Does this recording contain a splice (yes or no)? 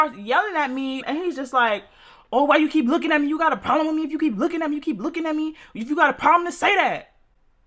yes